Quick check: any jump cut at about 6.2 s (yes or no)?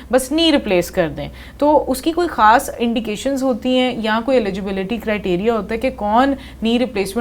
no